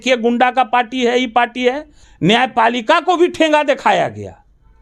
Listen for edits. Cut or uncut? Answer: cut